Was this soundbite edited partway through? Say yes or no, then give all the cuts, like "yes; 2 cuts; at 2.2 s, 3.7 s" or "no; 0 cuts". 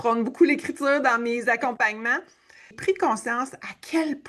yes; 1 cut; at 2.7 s